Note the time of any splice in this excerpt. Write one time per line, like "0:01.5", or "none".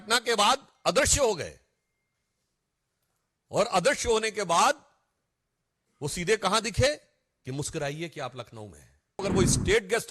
0:09.2